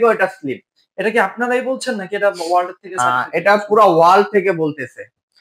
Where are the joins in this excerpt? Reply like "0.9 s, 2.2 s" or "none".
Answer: none